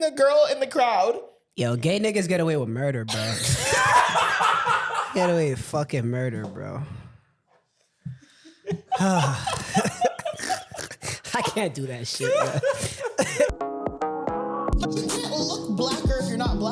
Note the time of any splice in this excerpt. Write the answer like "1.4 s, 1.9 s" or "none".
13.5 s